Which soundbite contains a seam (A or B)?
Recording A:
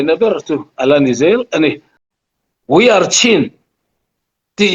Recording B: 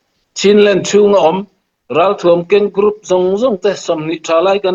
A